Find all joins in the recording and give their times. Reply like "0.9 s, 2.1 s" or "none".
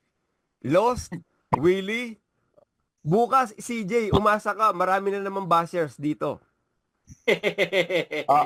none